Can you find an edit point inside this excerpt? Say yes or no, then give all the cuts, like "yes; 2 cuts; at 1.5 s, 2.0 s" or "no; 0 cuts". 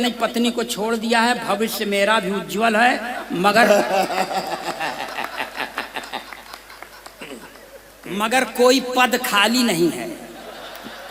no; 0 cuts